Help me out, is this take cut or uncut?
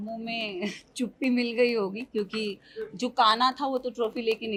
uncut